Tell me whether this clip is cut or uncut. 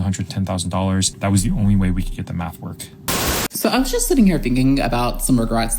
cut